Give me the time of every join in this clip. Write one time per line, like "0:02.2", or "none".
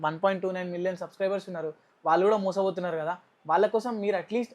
none